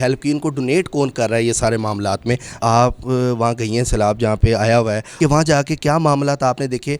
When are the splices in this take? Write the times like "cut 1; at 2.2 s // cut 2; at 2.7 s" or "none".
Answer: cut 1; at 2.5 s // cut 2; at 5.1 s

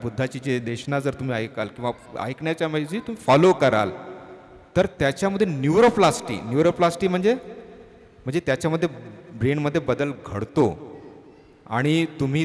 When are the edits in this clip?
none

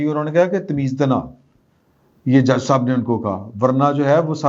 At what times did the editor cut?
none

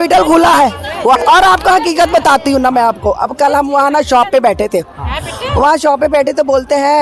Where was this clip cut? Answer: cut 1; at 1.2 s

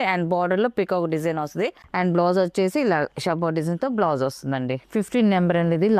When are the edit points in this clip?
cut 1; at 1.8 s // cut 2; at 4.8 s

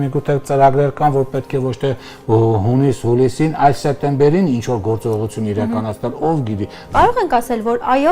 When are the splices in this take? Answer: cut 1; at 6.8 s

